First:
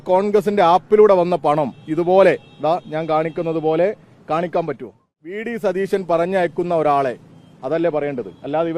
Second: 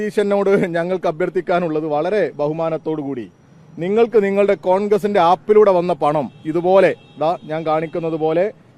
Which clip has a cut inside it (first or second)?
first